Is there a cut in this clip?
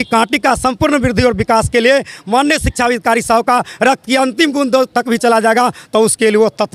no; 0 cuts

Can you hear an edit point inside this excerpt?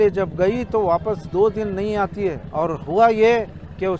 yes; 1 cut; at 2.4 s

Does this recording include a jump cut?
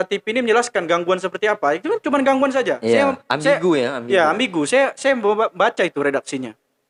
no; 0 cuts

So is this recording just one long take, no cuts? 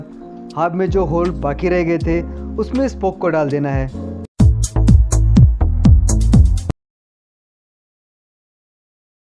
yes; 0 cuts

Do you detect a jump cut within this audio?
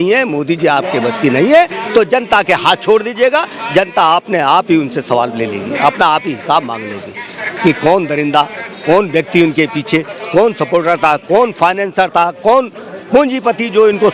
no; 0 cuts

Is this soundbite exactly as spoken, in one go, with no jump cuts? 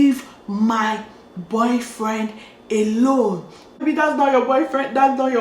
no; 1 cut; at 3.8 s

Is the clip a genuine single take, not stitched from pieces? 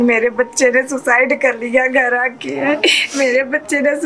yes; 0 cuts

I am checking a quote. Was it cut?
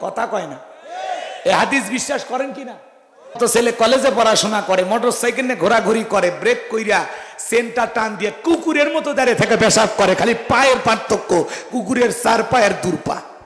yes; 1 cut; at 3.4 s

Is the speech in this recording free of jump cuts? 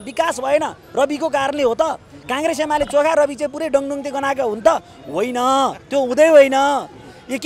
yes; 0 cuts

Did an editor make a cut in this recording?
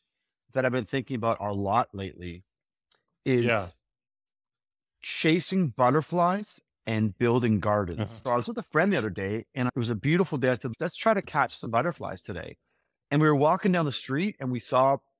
yes; 3 cuts; at 8.1 s, 9.7 s, 10.7 s

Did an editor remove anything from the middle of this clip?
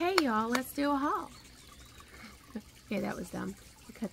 no; 0 cuts

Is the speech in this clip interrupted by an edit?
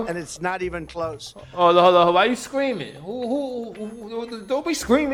no; 0 cuts

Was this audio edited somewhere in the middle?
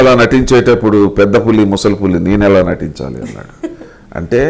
no; 0 cuts

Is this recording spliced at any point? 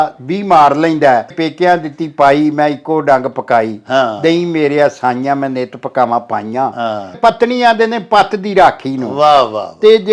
yes; 2 cuts; at 1.3 s, 7.2 s

